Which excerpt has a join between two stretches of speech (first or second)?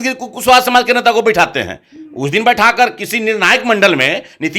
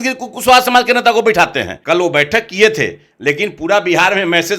second